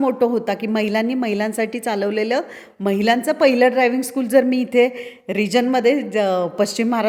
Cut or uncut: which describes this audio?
uncut